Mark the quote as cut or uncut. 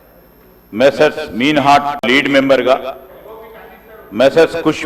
cut